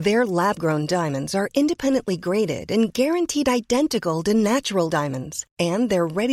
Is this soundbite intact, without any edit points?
yes; 0 cuts

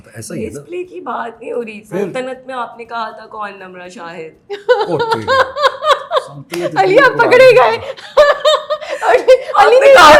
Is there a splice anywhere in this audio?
no; 0 cuts

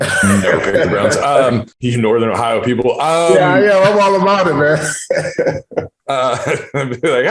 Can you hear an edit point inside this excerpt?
yes; 1 cut; at 1.7 s

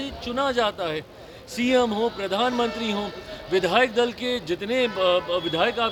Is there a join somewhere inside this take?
no; 0 cuts

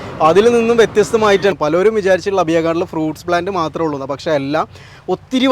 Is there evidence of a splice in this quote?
yes; 1 cut; at 1.5 s

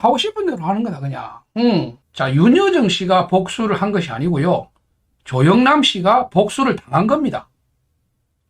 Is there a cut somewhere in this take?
yes; 1 cut; at 2.0 s

